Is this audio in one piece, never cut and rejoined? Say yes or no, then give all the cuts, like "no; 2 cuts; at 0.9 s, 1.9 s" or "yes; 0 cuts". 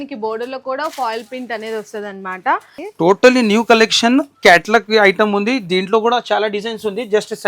no; 1 cut; at 2.8 s